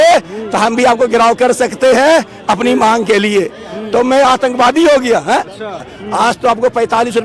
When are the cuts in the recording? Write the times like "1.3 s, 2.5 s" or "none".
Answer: 5.8 s